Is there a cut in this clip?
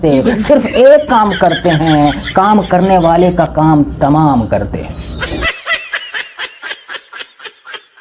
no; 0 cuts

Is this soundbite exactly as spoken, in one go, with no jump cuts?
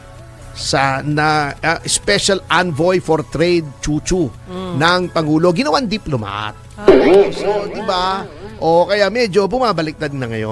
yes; 0 cuts

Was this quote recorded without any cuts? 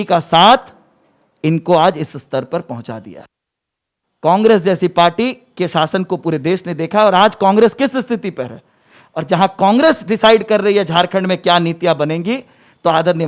yes; 0 cuts

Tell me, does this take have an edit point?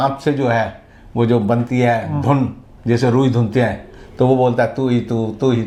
no; 0 cuts

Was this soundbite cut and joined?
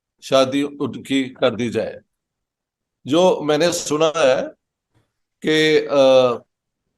no; 0 cuts

